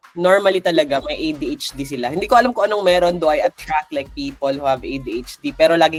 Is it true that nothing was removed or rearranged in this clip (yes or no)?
yes